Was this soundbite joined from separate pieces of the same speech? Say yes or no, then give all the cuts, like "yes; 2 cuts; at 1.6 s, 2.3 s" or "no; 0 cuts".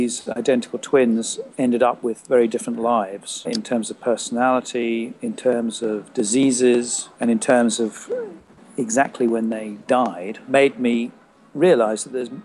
yes; 5 cuts; at 1.4 s, 3.5 s, 5.1 s, 7.0 s, 10.5 s